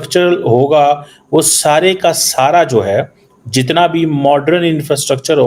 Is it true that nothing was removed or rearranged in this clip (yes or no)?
yes